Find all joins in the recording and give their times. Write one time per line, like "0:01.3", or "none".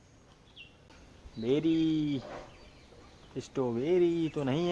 0:00.9